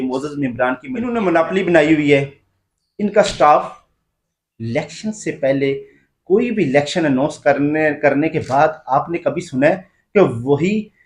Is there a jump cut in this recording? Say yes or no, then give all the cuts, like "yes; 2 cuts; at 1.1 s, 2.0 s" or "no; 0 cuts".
yes; 1 cut; at 1.1 s